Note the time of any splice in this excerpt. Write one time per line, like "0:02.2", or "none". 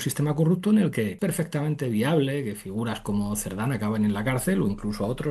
0:01.1